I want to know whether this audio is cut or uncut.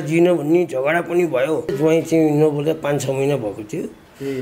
cut